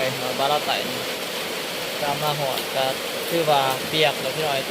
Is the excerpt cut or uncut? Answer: uncut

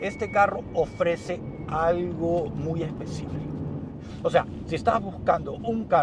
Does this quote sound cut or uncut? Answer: cut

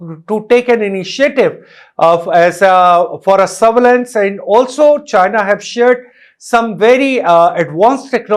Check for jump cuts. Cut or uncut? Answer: uncut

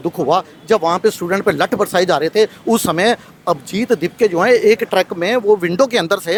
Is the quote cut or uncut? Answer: uncut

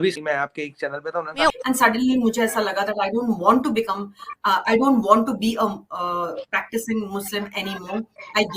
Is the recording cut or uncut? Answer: cut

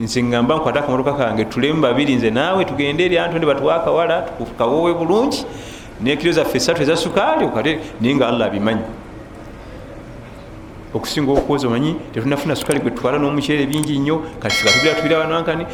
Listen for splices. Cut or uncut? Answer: uncut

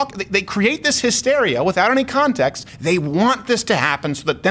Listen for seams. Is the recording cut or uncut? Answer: cut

